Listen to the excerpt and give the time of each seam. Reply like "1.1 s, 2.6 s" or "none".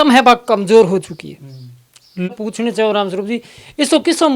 2.3 s